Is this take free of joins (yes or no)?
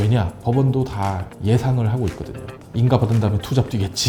yes